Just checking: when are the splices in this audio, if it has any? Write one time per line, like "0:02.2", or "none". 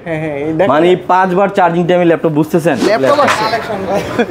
0:02.9